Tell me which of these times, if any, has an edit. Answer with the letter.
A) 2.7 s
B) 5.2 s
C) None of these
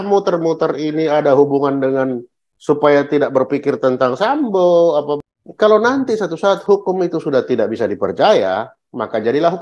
B